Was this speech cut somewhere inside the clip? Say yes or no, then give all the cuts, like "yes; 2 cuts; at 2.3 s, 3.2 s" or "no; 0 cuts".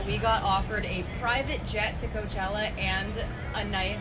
no; 0 cuts